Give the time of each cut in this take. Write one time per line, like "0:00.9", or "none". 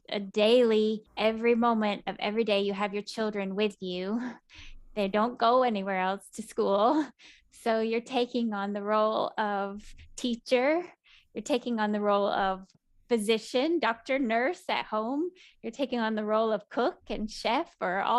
0:01.1